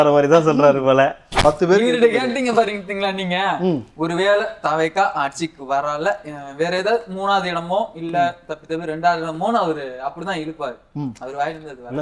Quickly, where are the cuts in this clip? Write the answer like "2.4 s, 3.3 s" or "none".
1.2 s